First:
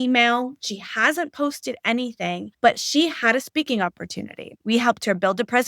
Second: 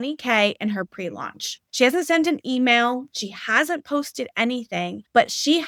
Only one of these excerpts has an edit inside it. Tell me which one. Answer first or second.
first